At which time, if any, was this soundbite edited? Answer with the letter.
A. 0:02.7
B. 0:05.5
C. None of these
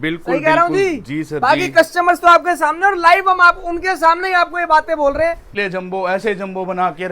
B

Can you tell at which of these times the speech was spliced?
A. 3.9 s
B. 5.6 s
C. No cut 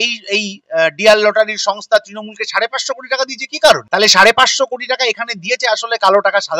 A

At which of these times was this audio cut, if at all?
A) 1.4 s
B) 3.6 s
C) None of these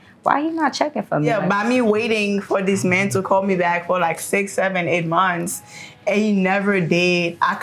A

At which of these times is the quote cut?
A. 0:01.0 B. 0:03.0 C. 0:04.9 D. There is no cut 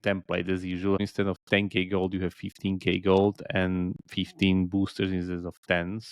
A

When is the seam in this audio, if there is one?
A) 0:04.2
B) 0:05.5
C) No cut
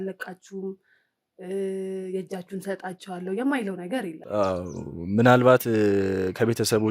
A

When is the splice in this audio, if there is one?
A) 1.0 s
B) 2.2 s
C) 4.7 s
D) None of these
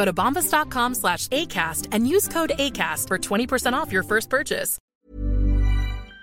C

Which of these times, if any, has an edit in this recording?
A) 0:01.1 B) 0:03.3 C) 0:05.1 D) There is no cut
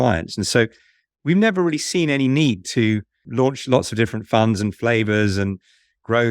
B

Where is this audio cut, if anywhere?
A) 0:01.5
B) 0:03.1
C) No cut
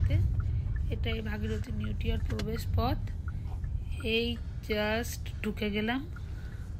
C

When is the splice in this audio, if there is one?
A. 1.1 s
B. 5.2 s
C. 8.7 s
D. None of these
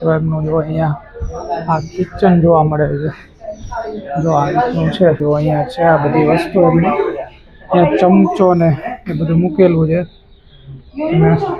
B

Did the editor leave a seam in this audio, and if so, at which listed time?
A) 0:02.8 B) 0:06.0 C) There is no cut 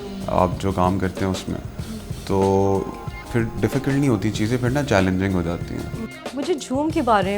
B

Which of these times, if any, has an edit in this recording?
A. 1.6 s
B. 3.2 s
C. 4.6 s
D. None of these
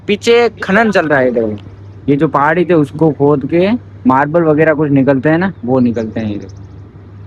D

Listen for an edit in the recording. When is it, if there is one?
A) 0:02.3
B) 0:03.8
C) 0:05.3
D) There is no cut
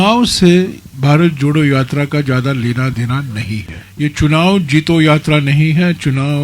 B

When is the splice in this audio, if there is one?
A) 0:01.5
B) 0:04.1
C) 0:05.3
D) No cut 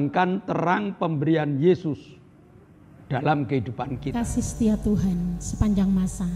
B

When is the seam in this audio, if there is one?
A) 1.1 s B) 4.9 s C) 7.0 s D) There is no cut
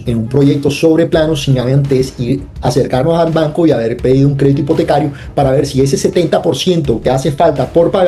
D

